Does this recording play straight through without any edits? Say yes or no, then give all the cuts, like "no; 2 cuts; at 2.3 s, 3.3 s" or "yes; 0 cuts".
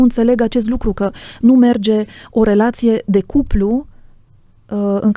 yes; 0 cuts